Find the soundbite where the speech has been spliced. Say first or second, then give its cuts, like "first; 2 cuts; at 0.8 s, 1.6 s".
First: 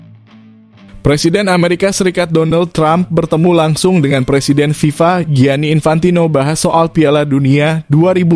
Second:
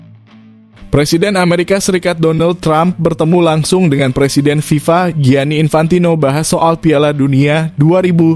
second; 1 cut; at 0.9 s